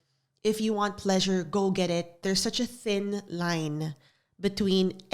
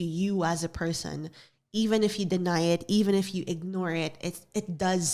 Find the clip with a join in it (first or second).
first